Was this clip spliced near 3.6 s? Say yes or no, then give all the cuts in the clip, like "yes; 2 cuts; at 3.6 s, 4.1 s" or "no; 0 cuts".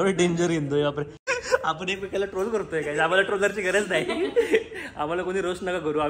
no; 1 cut; at 1.2 s